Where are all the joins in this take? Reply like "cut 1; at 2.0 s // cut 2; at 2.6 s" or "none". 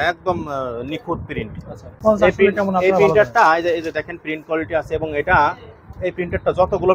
cut 1; at 1.9 s